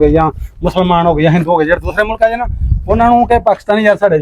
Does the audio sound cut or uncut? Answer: uncut